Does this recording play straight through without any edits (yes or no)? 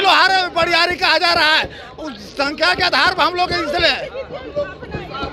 yes